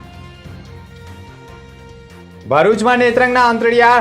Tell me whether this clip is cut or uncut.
cut